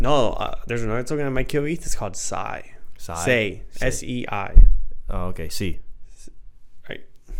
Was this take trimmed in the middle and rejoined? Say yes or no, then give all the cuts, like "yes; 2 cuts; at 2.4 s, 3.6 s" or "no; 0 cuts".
no; 0 cuts